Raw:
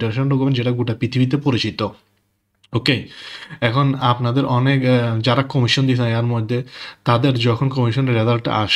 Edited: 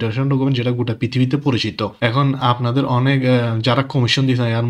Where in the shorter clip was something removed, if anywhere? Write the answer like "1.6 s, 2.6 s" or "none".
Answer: 1.9 s